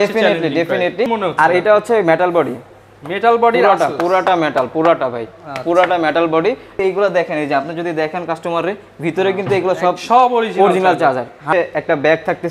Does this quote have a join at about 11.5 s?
yes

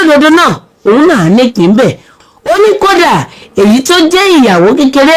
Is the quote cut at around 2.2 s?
yes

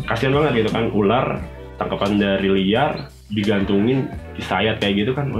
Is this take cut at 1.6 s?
no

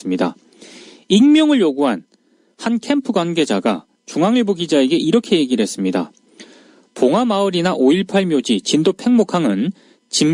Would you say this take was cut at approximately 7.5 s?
no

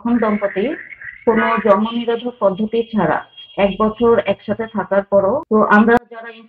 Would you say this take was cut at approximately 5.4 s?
yes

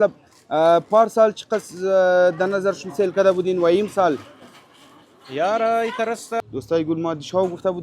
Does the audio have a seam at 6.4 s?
yes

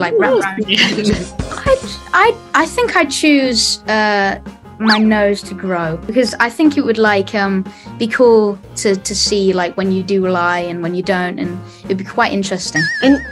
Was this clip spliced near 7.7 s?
no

